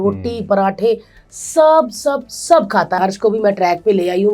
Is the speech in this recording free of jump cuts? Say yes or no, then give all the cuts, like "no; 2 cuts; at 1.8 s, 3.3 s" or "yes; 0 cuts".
no; 1 cut; at 3.0 s